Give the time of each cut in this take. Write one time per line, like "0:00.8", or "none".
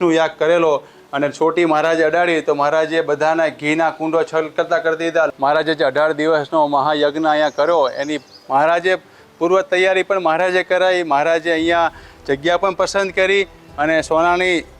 0:01.0
0:05.3